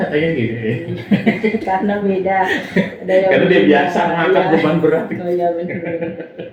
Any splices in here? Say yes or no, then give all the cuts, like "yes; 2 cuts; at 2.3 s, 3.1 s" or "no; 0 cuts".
no; 0 cuts